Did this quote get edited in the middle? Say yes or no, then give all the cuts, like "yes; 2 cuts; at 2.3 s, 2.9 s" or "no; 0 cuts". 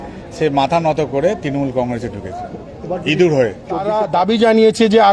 yes; 1 cut; at 3.9 s